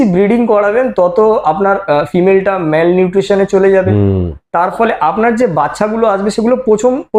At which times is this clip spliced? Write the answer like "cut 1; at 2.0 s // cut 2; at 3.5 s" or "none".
none